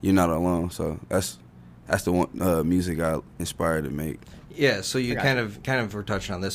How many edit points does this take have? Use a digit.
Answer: 0